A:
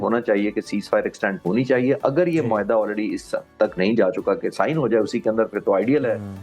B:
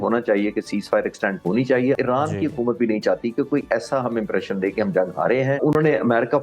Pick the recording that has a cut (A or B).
B